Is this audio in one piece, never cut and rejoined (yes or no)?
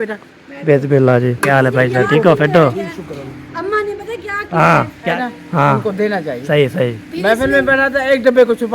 no